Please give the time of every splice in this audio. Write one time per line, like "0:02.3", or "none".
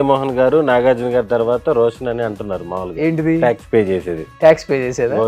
none

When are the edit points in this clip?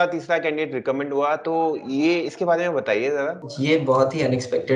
0:03.4

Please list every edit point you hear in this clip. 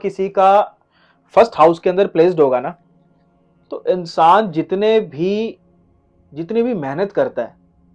none

